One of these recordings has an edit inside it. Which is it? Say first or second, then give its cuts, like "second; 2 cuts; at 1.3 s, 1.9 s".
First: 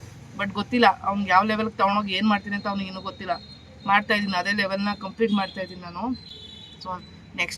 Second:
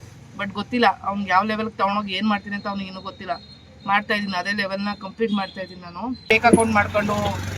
second; 1 cut; at 6.2 s